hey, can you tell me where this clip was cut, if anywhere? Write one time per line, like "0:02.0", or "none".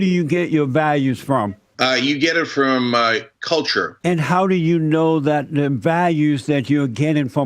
0:01.6
0:03.9